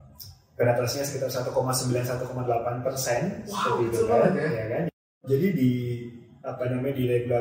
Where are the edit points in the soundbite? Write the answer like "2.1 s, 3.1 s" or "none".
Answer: 5.0 s